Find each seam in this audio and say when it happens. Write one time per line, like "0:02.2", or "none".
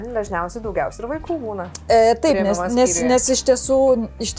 none